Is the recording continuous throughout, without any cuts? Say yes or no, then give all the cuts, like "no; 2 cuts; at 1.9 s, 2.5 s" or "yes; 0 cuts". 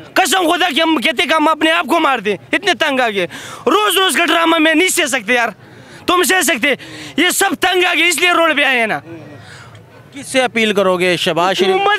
yes; 0 cuts